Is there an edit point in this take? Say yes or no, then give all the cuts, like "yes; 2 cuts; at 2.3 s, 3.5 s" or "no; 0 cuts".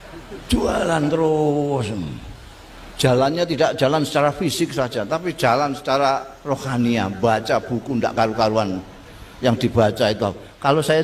no; 0 cuts